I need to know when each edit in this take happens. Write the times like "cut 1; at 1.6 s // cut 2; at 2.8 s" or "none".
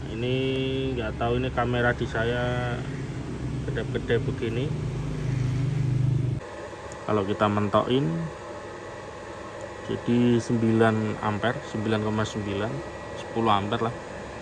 cut 1; at 6.4 s